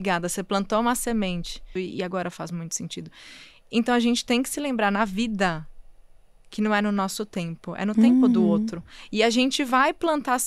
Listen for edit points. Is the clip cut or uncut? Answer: cut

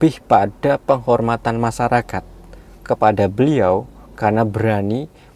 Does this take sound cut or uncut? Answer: uncut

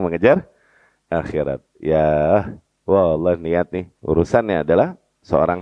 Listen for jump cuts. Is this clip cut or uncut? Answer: cut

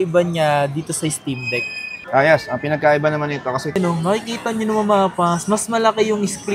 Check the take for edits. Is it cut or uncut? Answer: cut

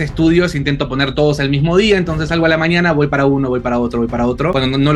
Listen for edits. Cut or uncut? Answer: uncut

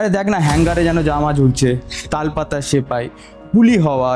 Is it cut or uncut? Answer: uncut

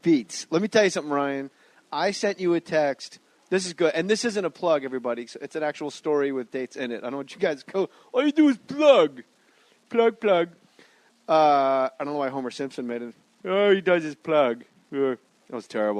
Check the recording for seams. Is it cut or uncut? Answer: cut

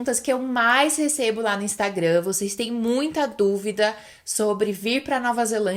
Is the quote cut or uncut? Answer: uncut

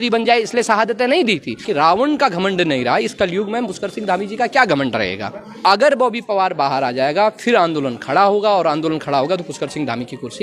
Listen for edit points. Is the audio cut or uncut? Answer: cut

